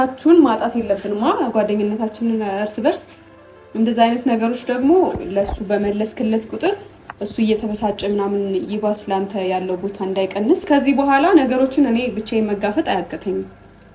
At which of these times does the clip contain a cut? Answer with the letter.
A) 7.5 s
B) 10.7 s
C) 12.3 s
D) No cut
B